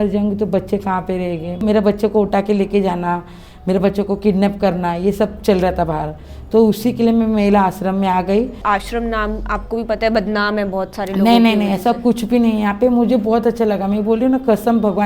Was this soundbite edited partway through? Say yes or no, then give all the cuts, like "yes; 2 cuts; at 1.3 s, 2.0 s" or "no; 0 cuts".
yes; 2 cuts; at 1.6 s, 8.6 s